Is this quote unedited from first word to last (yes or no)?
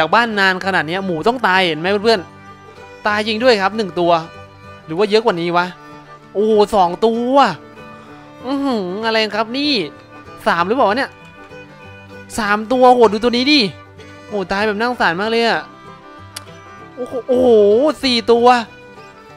yes